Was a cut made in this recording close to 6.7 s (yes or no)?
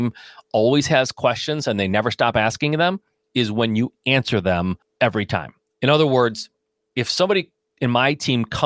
no